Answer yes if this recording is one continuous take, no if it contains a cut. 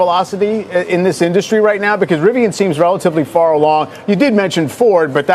yes